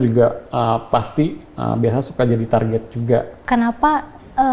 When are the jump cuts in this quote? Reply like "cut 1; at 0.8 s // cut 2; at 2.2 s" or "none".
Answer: cut 1; at 3.4 s